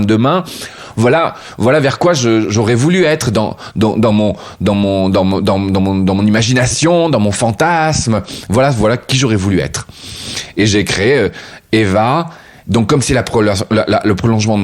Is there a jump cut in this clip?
no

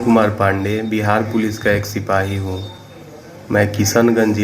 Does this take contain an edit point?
no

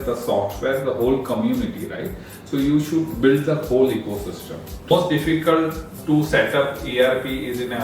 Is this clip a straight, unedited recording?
no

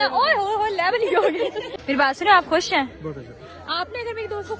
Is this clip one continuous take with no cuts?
no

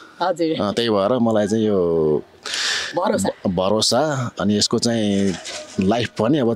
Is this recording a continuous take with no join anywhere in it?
yes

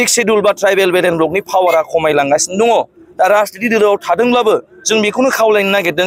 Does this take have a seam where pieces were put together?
no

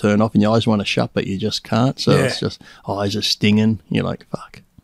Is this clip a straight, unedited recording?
yes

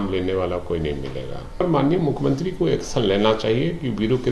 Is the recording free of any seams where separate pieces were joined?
no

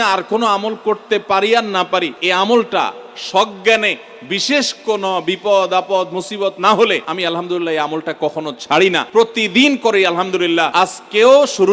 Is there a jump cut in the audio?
yes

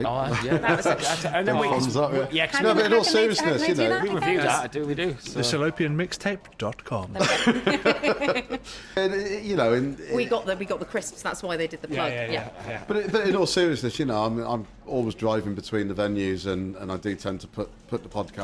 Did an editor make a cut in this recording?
yes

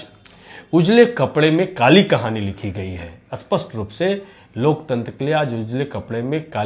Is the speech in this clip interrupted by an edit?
no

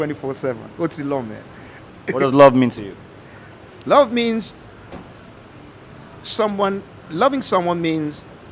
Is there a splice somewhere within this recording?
no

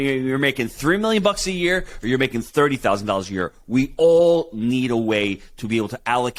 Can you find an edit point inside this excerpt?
no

